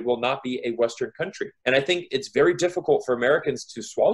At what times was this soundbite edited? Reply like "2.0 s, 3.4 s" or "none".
1.6 s